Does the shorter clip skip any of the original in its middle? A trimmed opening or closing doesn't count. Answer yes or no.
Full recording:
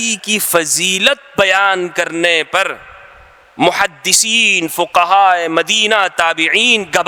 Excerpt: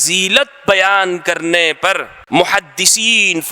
yes